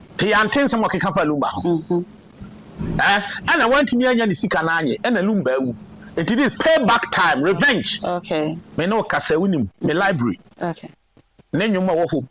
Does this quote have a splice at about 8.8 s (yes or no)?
yes